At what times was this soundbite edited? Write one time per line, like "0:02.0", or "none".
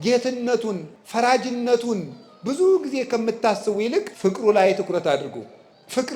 0:00.9
0:04.1